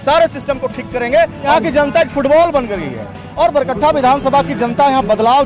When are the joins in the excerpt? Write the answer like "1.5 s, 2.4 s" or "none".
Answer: 1.5 s